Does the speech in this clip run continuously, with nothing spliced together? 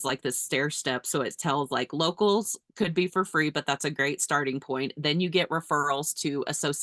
yes; 0 cuts

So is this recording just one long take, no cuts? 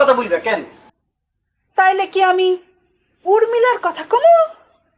yes; 0 cuts

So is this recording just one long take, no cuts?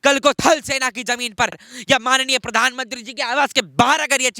no; 1 cut; at 1.7 s

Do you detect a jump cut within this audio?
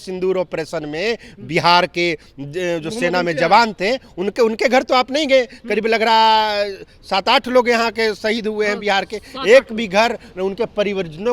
no; 0 cuts

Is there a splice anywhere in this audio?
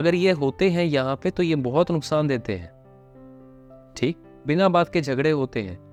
no; 0 cuts

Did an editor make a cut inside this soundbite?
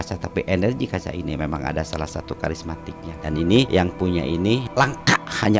yes; 3 cuts; at 3.1 s, 3.7 s, 4.7 s

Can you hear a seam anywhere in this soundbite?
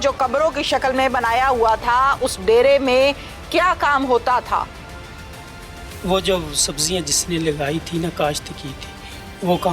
no; 0 cuts

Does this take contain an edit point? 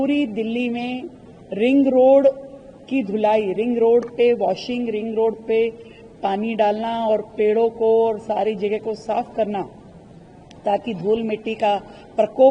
no; 0 cuts

